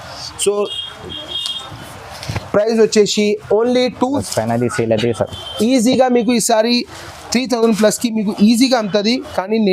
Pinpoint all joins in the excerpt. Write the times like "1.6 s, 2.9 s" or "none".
4.2 s